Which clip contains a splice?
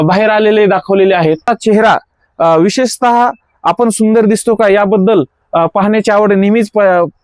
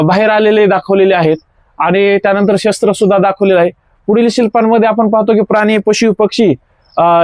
first; 1 cut; at 1.5 s

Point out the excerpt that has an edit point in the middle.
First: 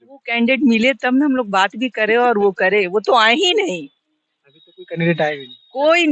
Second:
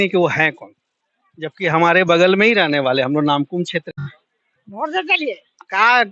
second; 1 cut; at 4.1 s

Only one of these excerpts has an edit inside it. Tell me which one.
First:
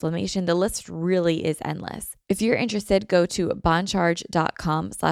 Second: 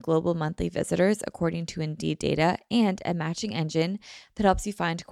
first; 1 cut; at 2.1 s

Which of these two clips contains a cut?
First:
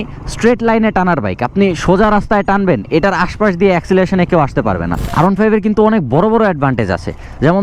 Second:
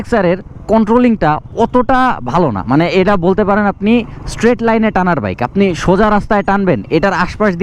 first; 1 cut; at 5.0 s

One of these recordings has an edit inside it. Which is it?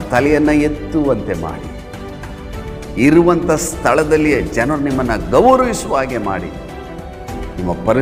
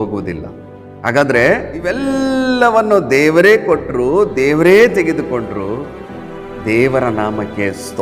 second; 1 cut; at 2.0 s

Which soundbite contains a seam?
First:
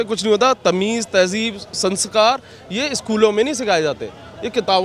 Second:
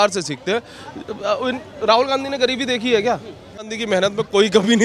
second; 1 cut; at 3.8 s

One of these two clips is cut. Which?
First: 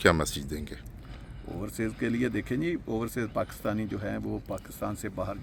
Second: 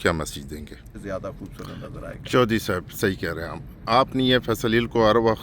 second; 1 cut; at 1.0 s

